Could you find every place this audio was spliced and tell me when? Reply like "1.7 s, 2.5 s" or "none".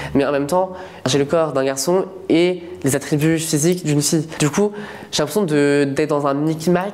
4.3 s